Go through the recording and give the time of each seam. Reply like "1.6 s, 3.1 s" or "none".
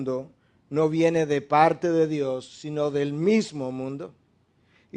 1.8 s